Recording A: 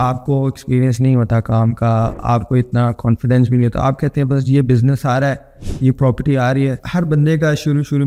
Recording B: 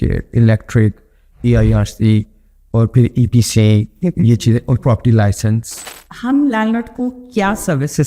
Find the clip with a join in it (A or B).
B